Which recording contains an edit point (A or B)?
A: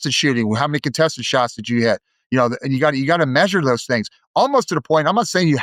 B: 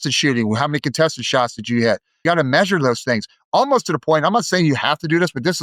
B